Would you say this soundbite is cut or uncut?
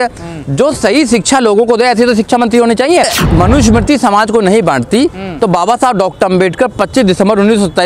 cut